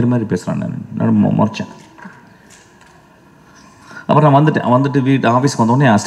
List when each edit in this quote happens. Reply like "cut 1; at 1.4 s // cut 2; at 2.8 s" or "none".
none

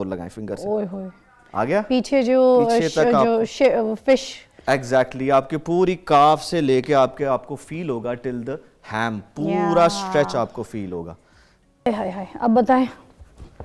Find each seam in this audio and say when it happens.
cut 1; at 11.9 s

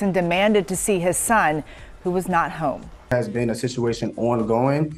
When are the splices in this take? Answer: cut 1; at 3.1 s

